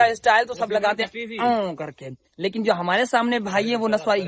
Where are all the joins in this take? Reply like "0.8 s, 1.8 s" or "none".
none